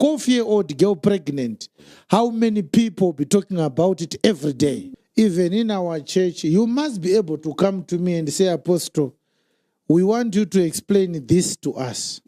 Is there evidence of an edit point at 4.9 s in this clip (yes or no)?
yes